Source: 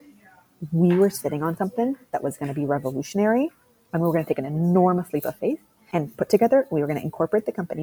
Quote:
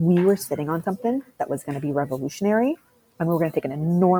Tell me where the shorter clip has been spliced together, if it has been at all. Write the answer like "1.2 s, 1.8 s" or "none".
none